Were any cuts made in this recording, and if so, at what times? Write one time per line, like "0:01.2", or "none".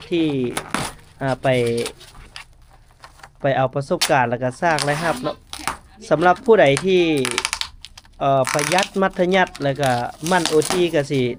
none